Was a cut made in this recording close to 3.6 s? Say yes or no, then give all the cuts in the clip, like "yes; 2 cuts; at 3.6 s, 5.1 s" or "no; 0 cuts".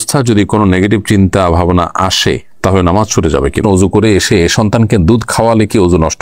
yes; 1 cut; at 3.6 s